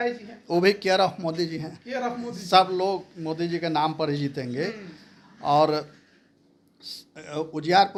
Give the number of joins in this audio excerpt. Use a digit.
0